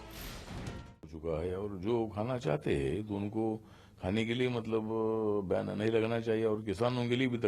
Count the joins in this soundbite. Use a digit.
1